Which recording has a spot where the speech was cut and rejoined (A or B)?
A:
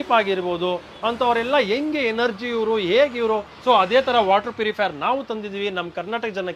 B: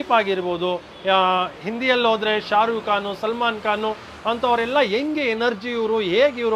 A